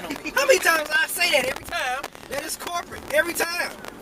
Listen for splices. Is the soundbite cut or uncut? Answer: uncut